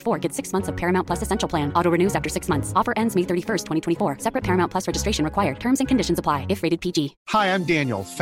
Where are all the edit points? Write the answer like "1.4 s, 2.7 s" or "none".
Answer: 7.2 s